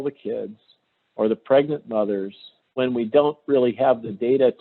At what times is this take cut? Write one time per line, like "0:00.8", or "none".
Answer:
0:02.6